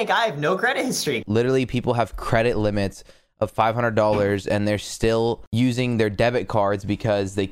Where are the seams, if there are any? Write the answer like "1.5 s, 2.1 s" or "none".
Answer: 1.2 s, 5.4 s